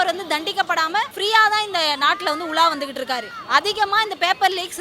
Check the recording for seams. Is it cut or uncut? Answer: cut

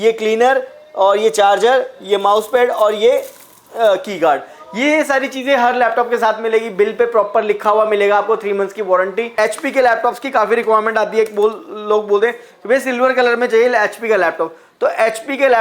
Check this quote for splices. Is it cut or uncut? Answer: cut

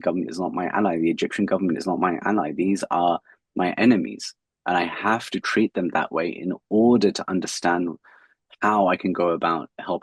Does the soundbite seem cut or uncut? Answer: uncut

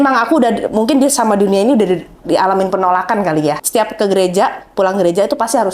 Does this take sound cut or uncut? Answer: cut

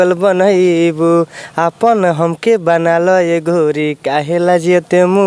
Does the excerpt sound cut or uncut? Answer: uncut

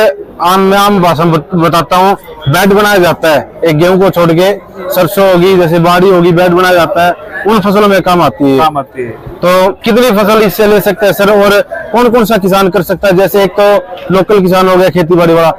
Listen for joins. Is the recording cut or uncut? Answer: uncut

